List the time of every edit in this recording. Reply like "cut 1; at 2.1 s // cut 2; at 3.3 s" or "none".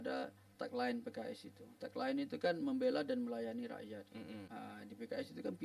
cut 1; at 4.5 s